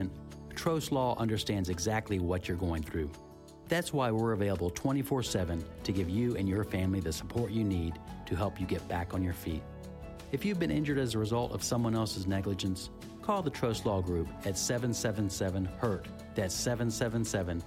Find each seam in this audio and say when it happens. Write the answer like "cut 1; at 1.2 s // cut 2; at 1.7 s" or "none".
none